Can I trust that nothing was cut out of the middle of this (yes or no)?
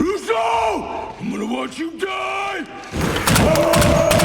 no